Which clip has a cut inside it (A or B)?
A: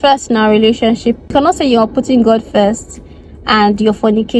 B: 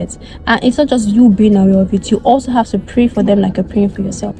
A